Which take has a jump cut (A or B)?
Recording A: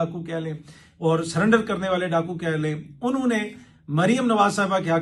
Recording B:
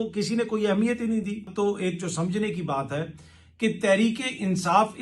B